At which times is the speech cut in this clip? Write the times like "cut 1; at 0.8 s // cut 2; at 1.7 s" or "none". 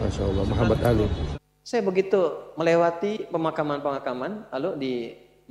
cut 1; at 1.3 s